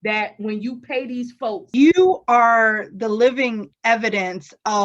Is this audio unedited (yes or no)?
no